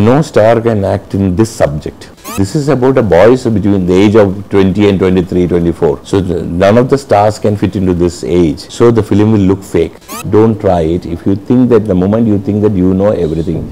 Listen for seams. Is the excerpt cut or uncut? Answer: cut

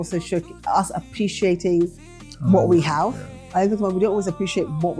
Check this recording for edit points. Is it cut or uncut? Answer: uncut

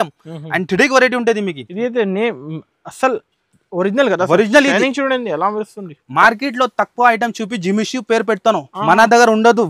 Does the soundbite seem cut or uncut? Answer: cut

